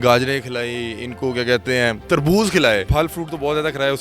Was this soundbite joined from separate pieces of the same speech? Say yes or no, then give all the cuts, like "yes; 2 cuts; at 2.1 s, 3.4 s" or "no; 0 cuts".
yes; 1 cut; at 2.9 s